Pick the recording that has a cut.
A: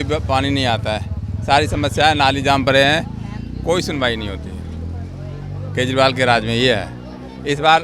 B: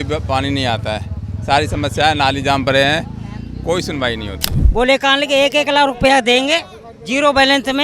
B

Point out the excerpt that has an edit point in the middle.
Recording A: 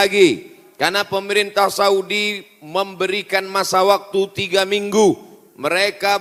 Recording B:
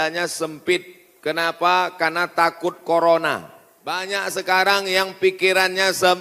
B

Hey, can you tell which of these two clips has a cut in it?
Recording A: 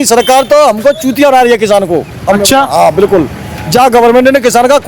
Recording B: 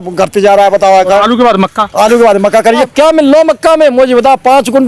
B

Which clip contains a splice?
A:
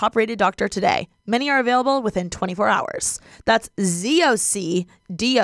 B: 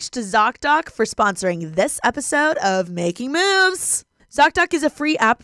B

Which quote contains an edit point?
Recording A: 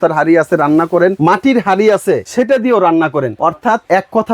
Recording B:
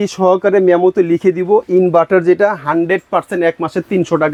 A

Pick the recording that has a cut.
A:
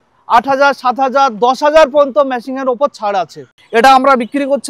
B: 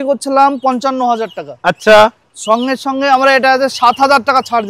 A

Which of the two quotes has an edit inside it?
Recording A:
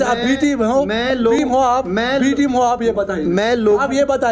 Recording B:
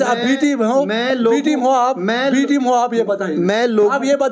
A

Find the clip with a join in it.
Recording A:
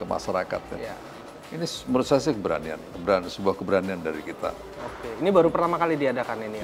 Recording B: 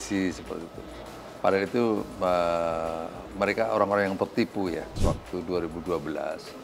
B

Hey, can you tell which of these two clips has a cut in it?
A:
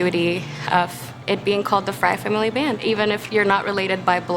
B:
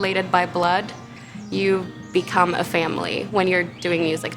A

